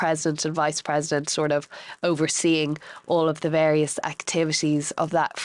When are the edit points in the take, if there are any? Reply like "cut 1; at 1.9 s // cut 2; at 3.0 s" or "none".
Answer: none